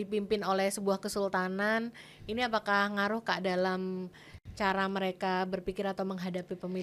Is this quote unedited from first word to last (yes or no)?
yes